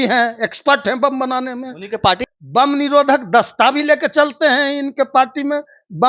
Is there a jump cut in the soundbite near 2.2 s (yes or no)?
yes